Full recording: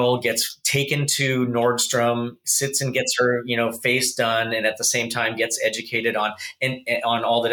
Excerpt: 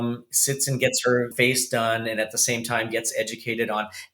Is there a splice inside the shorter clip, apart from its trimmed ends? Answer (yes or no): yes